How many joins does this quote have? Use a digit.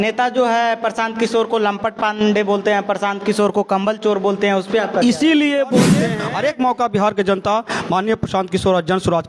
1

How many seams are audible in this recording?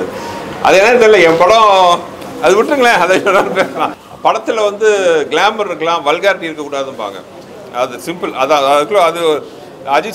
1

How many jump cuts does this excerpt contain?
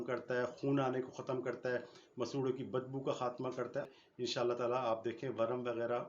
1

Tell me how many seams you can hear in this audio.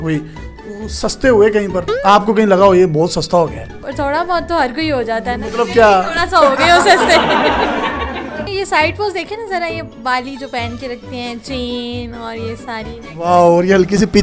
2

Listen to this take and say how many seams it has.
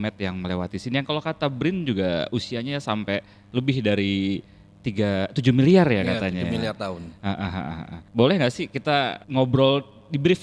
1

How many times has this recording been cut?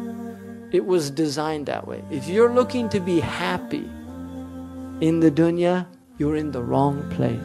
1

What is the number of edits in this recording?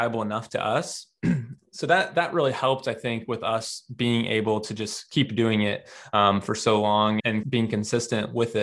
1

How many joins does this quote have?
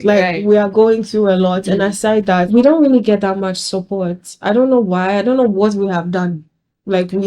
1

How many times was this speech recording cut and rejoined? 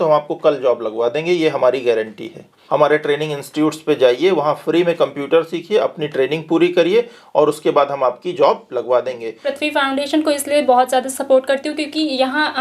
2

